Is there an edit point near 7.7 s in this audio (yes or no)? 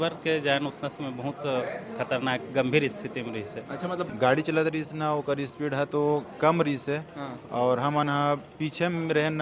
no